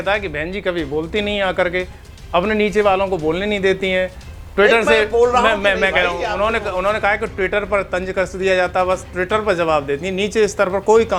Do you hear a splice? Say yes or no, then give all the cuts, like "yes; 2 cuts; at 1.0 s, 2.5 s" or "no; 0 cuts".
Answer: no; 0 cuts